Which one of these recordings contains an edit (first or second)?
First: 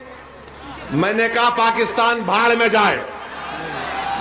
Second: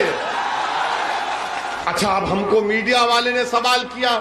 second